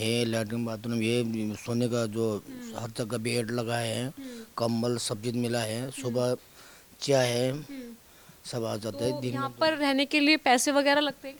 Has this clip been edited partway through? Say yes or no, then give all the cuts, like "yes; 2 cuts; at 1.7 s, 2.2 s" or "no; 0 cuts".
no; 0 cuts